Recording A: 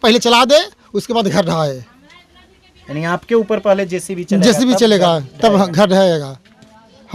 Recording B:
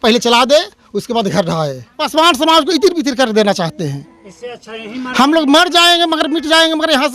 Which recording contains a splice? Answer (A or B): B